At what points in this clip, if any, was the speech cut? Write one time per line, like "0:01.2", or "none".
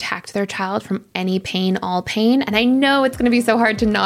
none